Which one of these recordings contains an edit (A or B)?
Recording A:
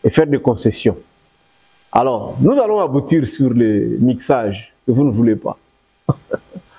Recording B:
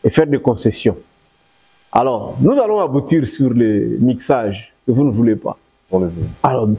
B